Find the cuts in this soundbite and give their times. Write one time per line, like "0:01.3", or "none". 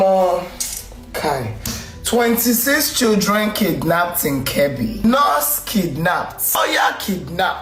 none